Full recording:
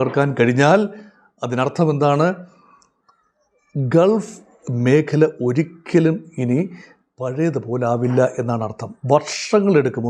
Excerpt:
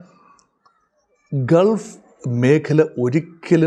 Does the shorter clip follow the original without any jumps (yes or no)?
yes